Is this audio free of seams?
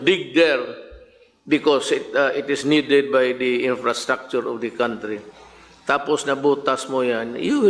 yes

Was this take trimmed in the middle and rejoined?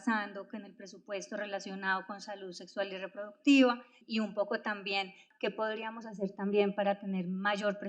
yes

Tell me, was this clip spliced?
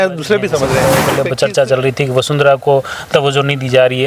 yes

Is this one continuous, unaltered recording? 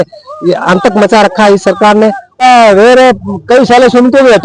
no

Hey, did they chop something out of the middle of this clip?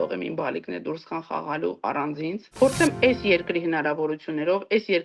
yes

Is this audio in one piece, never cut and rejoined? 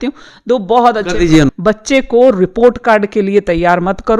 no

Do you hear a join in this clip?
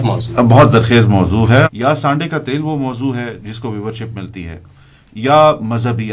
yes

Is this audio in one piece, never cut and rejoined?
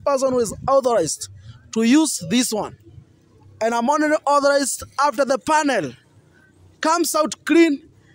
yes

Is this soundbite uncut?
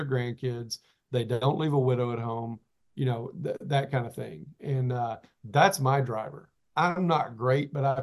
yes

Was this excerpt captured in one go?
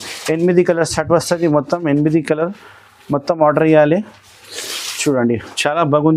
yes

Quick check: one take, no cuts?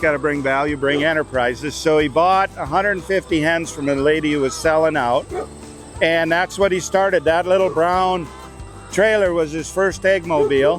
yes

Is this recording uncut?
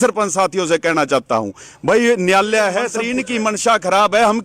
no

